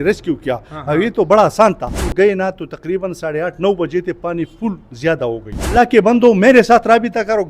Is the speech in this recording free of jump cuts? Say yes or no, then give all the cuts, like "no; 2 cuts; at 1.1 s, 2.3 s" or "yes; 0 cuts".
no; 2 cuts; at 2.1 s, 5.7 s